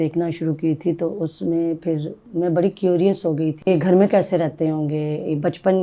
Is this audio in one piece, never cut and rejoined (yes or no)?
no